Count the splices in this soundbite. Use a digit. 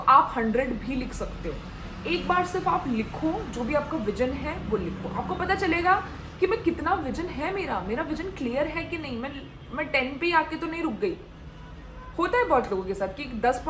0